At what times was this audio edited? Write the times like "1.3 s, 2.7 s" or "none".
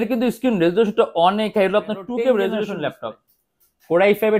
2.7 s